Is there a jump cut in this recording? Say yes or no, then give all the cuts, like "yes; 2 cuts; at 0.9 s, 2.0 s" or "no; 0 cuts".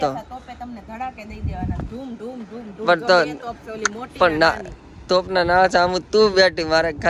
no; 0 cuts